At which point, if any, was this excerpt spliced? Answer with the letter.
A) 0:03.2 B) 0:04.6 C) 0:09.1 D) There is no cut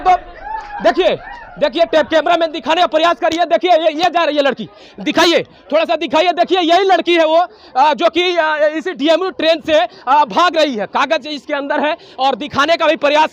D